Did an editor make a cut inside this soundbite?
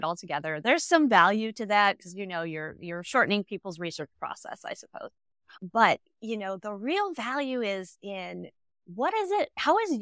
no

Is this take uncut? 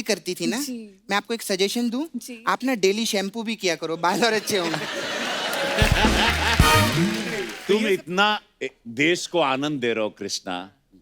no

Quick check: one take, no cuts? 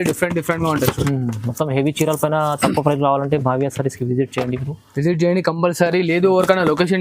yes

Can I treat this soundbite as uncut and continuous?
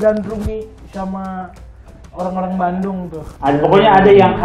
no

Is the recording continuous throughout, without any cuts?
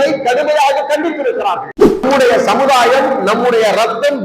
no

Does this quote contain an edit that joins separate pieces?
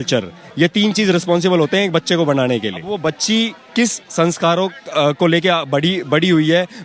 yes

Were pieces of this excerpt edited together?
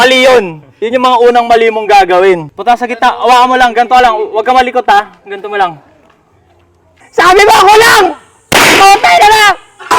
yes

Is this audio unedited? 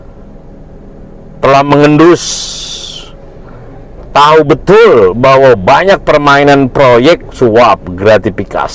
no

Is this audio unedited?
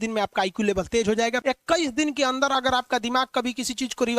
no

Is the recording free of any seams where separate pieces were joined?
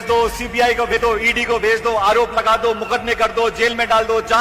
no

